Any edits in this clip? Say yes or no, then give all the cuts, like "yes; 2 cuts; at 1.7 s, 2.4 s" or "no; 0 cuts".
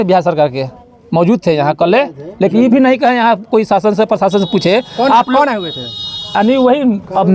no; 0 cuts